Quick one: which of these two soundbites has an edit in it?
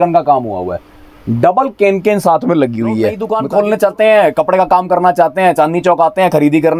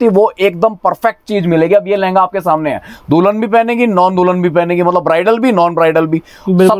first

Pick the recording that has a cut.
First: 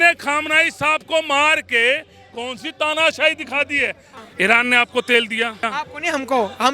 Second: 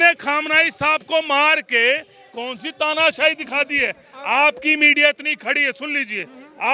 first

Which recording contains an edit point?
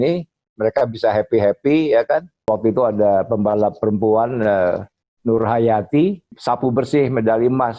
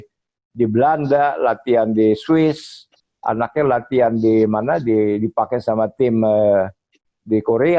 first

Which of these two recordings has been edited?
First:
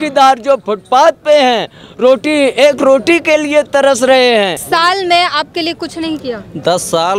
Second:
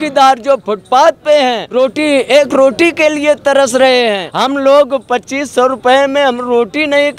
second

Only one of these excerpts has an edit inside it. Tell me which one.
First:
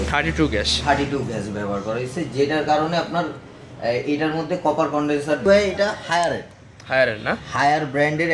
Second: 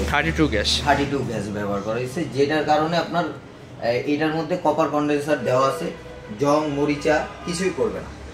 first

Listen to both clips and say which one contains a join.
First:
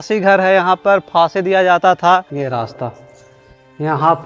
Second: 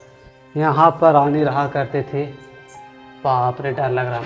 first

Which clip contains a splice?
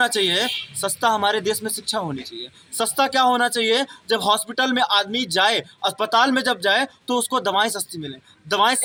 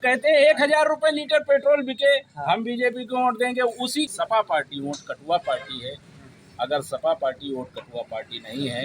second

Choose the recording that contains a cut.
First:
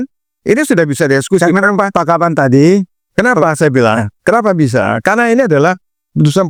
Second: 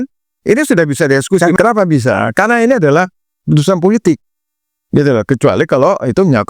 second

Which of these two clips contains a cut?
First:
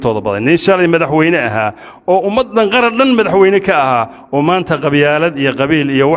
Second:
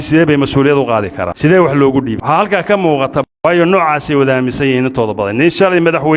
second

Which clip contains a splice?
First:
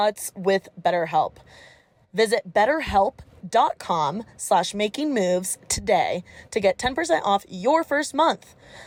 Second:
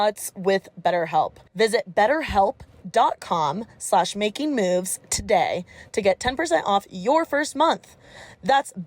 second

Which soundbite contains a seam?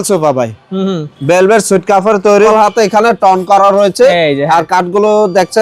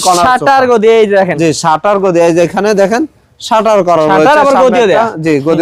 first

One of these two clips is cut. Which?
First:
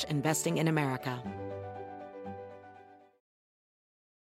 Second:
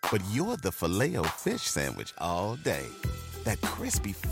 first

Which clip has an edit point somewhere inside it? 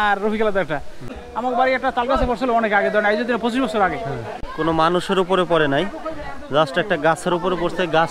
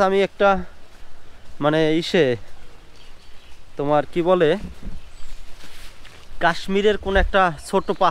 first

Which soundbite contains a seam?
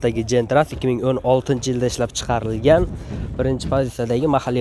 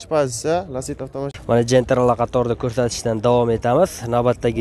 second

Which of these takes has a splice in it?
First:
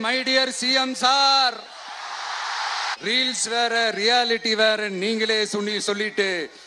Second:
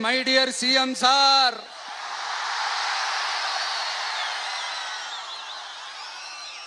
first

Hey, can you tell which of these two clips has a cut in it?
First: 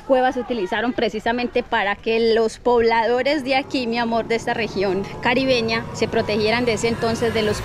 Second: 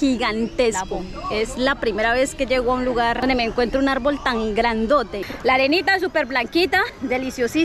second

